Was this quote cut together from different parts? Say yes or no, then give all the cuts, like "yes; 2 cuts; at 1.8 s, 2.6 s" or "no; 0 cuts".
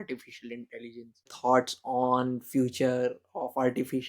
yes; 1 cut; at 1.3 s